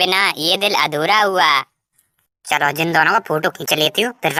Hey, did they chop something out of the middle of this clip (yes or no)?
no